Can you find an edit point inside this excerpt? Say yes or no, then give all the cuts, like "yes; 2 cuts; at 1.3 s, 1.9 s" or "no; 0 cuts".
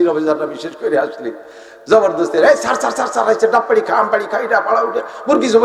no; 0 cuts